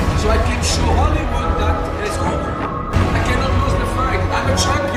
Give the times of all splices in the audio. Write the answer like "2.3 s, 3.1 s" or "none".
none